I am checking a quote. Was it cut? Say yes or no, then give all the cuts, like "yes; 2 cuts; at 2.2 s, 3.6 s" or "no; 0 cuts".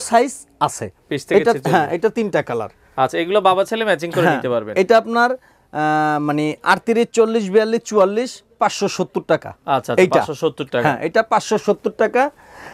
no; 0 cuts